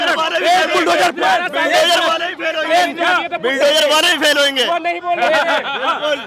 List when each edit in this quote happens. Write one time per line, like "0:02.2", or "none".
none